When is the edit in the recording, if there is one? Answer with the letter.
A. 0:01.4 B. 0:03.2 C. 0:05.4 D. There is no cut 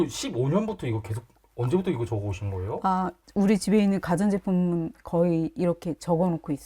B